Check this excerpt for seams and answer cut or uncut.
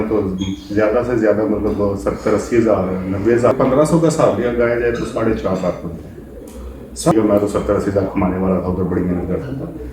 cut